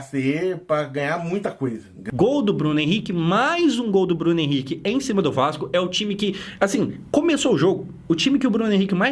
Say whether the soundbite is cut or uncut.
cut